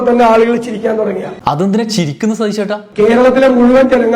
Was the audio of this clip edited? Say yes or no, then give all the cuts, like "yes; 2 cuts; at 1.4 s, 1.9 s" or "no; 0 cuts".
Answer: no; 0 cuts